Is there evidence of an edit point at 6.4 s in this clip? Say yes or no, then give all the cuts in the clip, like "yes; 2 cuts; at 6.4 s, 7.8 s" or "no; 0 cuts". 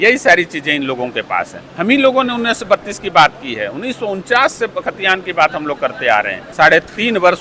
yes; 2 cuts; at 1.6 s, 6.4 s